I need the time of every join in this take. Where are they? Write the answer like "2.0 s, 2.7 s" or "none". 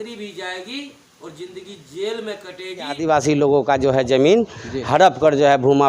3.0 s